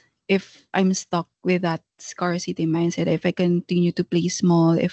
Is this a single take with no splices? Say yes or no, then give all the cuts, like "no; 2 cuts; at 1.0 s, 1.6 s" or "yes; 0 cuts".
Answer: yes; 0 cuts